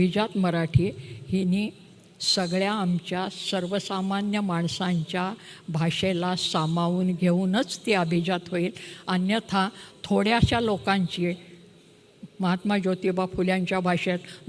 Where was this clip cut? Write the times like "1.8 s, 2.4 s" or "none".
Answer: none